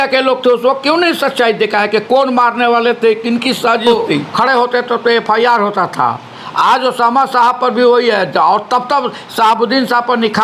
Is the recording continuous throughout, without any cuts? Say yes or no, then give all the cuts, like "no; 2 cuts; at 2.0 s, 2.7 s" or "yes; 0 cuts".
no; 1 cut; at 3.9 s